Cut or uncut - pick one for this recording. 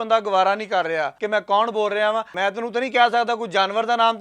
cut